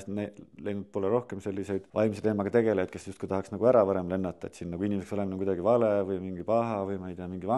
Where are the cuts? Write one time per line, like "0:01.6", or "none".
0:01.9